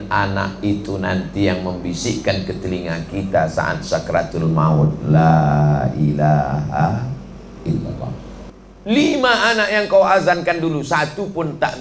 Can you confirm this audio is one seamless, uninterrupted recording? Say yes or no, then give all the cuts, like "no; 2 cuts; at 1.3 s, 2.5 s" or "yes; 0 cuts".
no; 1 cut; at 8.4 s